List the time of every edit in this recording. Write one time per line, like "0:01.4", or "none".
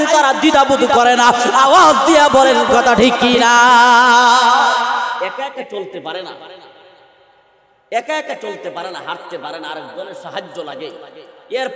0:05.2